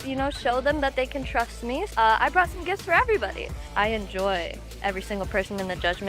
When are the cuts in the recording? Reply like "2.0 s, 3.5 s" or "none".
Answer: 1.9 s, 3.6 s